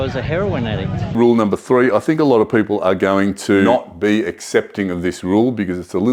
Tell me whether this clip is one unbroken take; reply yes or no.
no